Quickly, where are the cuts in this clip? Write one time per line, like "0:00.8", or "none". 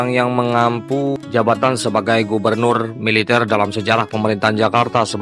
0:01.2